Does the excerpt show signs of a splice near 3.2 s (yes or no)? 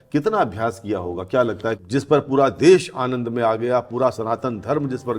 no